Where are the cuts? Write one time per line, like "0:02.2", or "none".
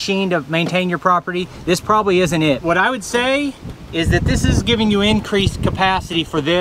0:02.6